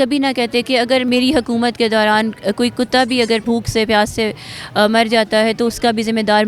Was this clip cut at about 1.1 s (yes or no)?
yes